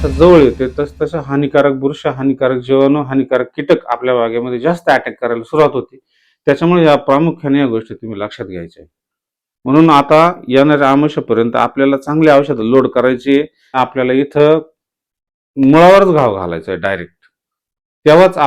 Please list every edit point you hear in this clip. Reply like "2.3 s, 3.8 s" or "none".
13.8 s